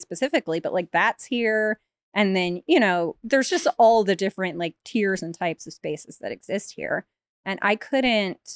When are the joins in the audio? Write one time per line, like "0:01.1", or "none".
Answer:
none